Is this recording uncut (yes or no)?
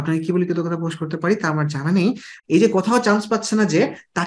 no